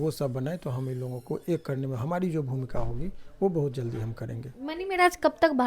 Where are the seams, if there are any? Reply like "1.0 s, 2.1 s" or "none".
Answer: 4.4 s